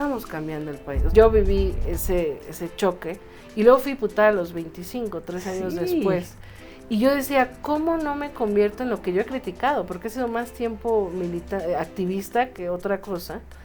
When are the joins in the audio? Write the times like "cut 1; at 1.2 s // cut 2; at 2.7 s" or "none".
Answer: cut 1; at 1.0 s